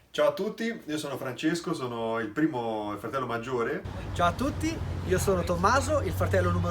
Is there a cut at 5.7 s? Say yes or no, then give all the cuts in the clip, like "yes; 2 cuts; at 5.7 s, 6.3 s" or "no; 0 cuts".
no; 1 cut; at 4.0 s